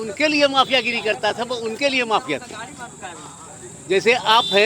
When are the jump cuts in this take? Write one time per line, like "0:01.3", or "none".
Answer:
none